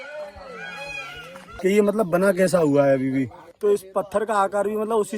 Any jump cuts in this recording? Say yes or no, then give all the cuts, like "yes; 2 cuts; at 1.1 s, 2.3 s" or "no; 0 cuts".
yes; 2 cuts; at 1.4 s, 3.4 s